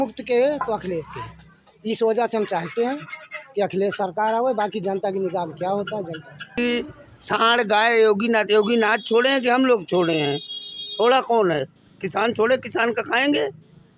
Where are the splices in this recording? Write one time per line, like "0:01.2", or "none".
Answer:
0:06.6

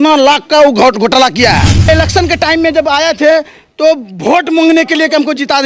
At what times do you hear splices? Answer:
0:01.9

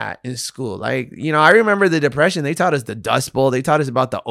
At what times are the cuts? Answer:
none

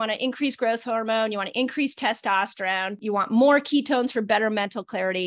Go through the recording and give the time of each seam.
0:03.0

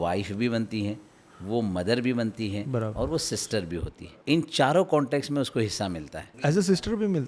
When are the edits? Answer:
0:04.0
0:06.5

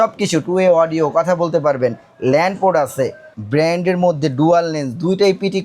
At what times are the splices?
0:03.3

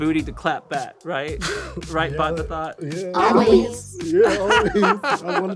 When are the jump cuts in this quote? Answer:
0:01.0

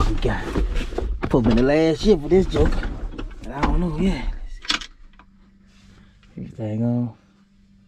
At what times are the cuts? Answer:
none

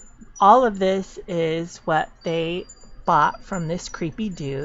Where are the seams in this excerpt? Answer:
none

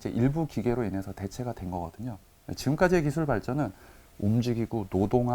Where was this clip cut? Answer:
0:02.3

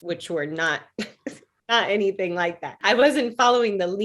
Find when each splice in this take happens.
0:01.5
0:02.7

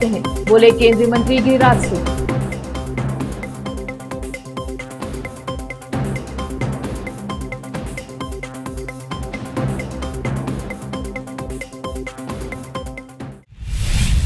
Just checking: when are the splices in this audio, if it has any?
0:13.4

